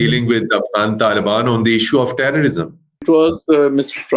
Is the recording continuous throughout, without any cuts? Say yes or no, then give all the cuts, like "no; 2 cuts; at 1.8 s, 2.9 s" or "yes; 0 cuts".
no; 1 cut; at 3.0 s